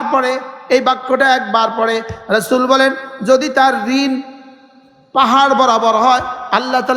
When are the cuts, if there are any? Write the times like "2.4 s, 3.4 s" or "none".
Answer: none